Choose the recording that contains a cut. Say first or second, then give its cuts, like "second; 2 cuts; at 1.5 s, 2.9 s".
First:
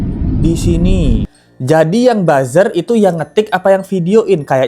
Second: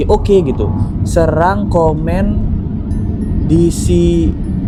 first; 1 cut; at 1.4 s